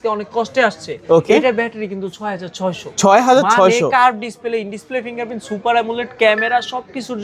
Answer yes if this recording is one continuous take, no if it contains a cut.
yes